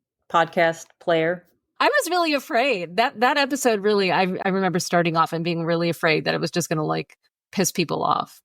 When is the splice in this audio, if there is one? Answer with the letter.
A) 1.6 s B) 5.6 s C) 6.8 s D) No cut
A